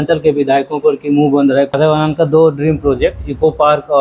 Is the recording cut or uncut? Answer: cut